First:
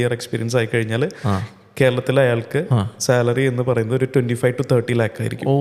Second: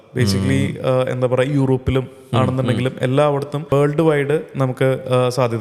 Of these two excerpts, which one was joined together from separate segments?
second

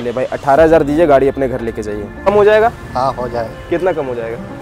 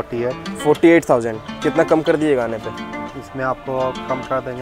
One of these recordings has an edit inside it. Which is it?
first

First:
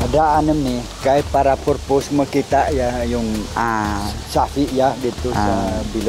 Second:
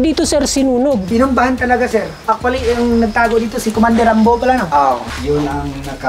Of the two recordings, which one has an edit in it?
second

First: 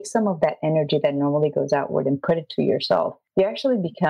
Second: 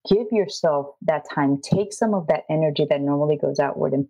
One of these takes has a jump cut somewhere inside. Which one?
first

